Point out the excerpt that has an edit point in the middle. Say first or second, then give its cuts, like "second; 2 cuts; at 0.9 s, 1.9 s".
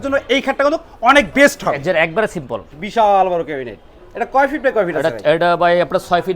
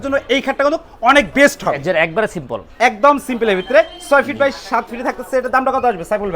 first; 1 cut; at 2.6 s